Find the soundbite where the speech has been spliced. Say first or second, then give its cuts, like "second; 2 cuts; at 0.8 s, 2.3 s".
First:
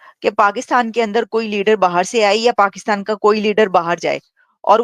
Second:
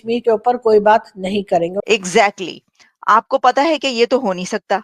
second; 1 cut; at 1.8 s